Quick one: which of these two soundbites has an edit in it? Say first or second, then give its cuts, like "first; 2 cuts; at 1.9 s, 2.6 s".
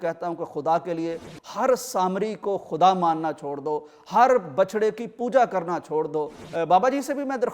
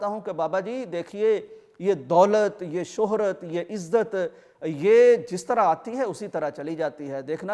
first; 1 cut; at 6.4 s